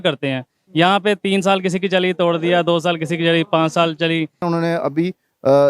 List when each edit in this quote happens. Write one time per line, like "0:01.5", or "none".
0:04.4

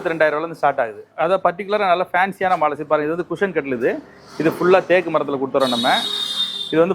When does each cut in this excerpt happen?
0:01.0

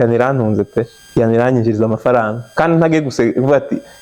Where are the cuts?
0:01.0

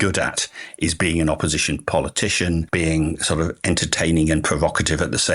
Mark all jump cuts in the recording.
none

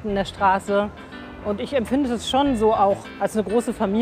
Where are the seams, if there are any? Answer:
0:03.1

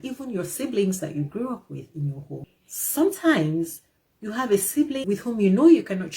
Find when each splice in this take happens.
0:02.4
0:05.0

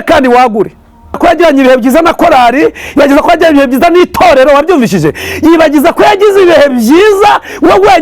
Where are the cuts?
0:01.2

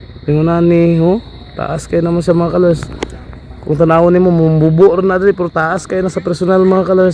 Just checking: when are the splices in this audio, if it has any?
none

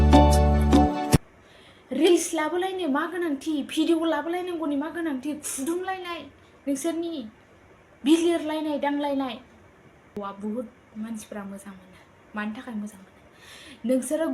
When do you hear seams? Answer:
0:01.2
0:10.2

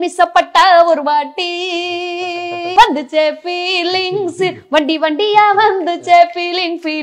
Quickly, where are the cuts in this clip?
0:02.7

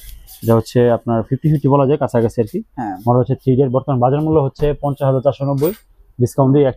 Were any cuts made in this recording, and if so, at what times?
none

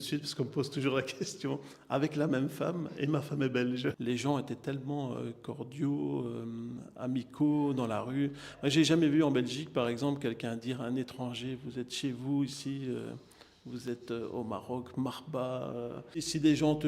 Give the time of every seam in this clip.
0:04.0
0:16.1

